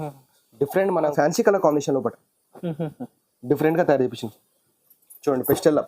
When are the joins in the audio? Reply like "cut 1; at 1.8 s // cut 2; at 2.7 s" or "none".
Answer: cut 1; at 1.0 s